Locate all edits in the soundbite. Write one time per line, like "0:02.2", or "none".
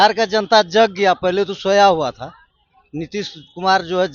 none